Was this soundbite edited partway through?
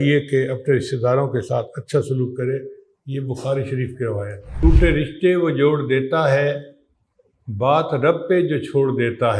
yes; 1 cut; at 4.6 s

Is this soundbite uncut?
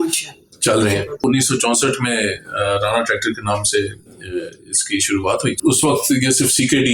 no; 2 cuts; at 1.2 s, 5.6 s

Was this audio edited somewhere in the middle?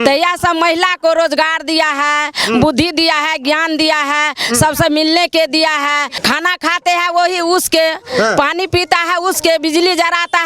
yes; 1 cut; at 6.2 s

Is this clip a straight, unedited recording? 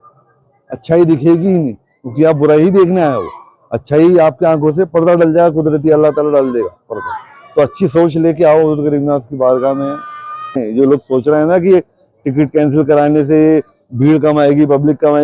no; 1 cut; at 10.6 s

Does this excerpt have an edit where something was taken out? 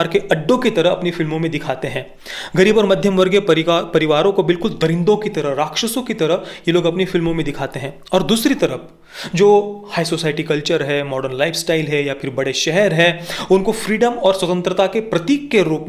no; 0 cuts

